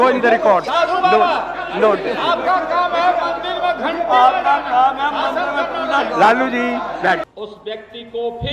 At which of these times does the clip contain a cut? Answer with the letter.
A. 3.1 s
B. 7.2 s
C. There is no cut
B